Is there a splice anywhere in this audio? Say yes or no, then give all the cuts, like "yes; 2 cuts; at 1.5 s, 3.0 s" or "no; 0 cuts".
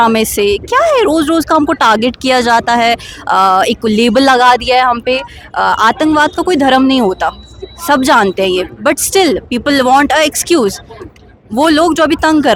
no; 0 cuts